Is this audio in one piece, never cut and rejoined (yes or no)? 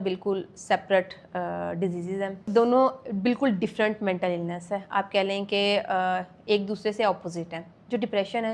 yes